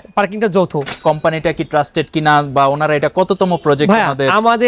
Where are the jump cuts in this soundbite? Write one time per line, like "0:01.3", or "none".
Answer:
0:01.0